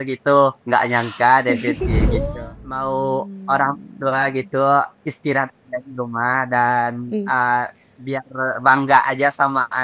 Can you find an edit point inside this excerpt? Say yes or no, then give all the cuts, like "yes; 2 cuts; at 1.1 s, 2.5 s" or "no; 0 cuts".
yes; 1 cut; at 2.2 s